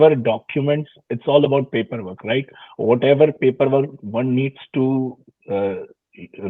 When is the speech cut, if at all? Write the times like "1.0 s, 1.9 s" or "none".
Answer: none